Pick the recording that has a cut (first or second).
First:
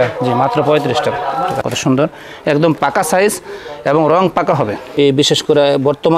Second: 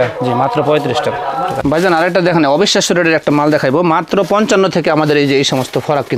first